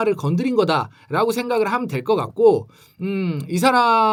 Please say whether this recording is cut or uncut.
uncut